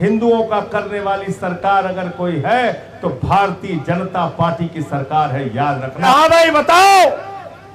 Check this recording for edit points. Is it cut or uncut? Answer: cut